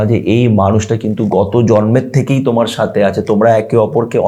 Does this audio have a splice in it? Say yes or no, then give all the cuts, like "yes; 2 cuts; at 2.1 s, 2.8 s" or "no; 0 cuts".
no; 0 cuts